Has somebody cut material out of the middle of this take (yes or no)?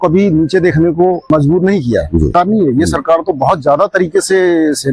yes